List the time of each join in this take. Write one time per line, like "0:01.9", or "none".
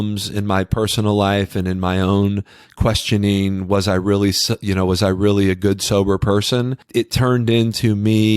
0:06.8